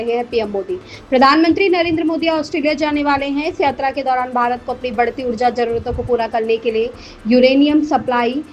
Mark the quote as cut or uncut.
uncut